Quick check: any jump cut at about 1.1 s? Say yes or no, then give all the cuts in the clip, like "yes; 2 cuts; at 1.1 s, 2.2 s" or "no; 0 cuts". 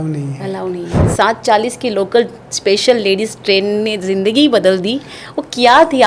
yes; 1 cut; at 1.1 s